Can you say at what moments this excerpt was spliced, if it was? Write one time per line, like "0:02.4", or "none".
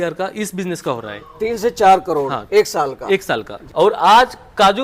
0:03.6